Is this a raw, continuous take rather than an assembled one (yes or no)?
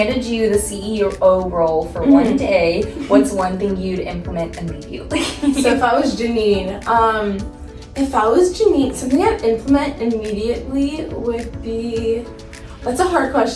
yes